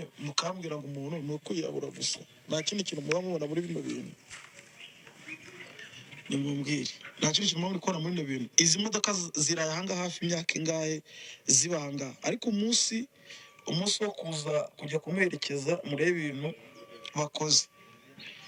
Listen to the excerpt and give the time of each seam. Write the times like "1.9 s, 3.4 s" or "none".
none